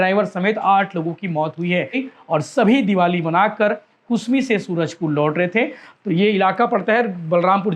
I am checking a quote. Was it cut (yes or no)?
yes